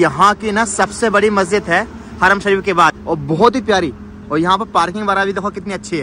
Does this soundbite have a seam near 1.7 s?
no; 0 cuts

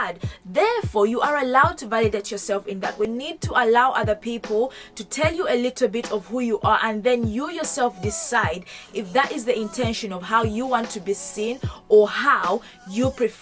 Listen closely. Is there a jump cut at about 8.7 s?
no; 1 cut; at 3.1 s

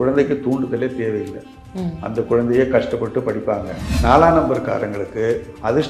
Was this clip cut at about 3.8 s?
yes; 1 cut; at 3.8 s

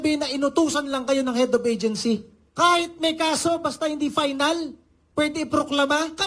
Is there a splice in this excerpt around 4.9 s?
no; 1 cut; at 2.4 s

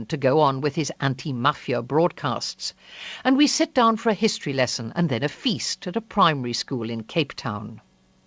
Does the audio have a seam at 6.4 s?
yes; 1 cut; at 6.4 s

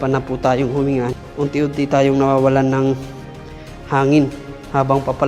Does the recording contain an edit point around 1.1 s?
yes; 1 cut; at 1.1 s

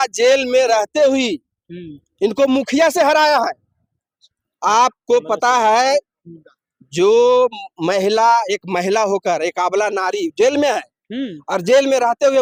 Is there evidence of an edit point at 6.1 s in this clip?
no; 0 cuts

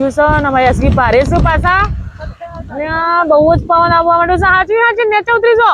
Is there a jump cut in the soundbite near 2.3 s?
no; 0 cuts

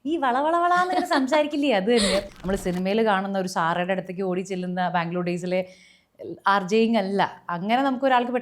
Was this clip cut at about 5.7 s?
no; 2 cuts; at 2.3 s, 7.4 s

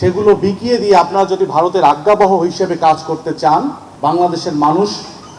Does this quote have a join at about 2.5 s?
no; 1 cut; at 3.8 s

